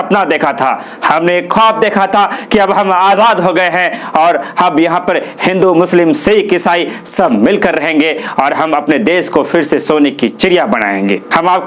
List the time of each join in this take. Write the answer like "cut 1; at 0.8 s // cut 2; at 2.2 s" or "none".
none